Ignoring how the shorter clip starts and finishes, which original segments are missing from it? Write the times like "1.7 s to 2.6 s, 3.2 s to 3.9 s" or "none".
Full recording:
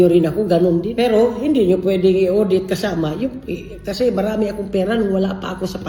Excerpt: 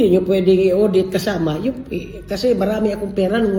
none